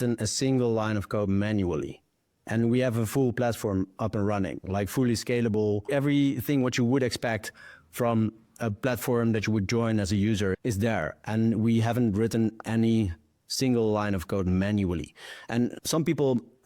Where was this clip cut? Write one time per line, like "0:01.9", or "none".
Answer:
0:05.9
0:10.6
0:15.8